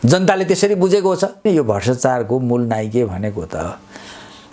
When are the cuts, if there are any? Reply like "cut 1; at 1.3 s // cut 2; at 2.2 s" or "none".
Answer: cut 1; at 1.4 s

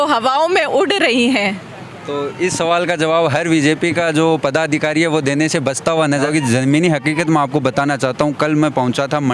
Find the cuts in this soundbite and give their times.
cut 1; at 6.3 s

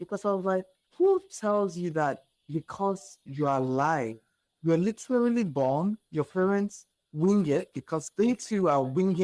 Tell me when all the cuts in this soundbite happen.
none

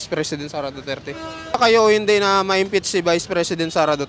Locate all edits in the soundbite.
cut 1; at 1.6 s

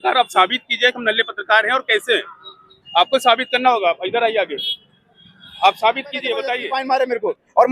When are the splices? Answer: cut 1; at 6.7 s

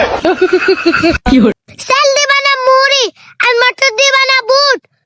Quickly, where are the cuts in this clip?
cut 1; at 1.5 s

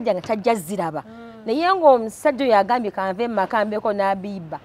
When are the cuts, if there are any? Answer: none

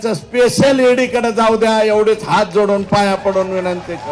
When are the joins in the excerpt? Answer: none

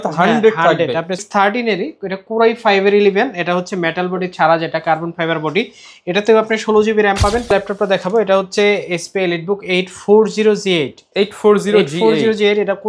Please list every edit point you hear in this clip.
cut 1; at 1.2 s // cut 2; at 7.5 s

